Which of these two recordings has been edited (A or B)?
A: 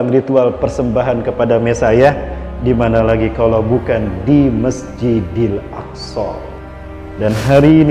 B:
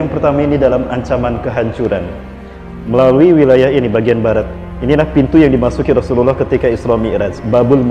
A